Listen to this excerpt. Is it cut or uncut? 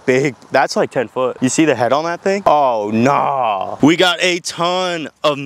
cut